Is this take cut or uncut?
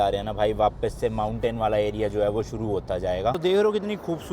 cut